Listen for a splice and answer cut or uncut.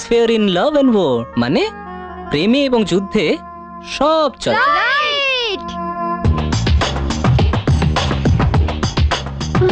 uncut